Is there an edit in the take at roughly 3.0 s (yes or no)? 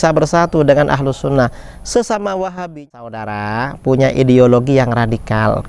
yes